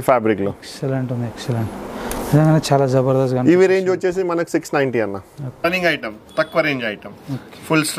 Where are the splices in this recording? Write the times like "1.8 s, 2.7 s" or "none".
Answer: 5.6 s